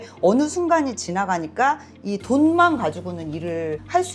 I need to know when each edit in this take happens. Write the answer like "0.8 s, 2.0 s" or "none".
none